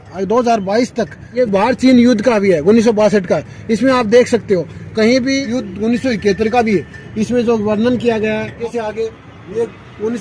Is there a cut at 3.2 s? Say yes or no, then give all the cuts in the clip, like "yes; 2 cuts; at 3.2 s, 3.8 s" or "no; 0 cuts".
no; 3 cuts; at 1.4 s, 5.4 s, 8.6 s